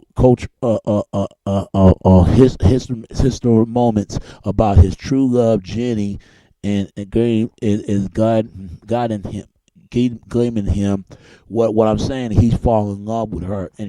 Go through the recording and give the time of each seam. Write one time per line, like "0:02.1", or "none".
0:03.4